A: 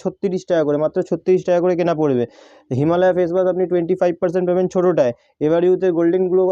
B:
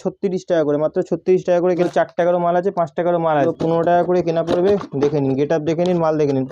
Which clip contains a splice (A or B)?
B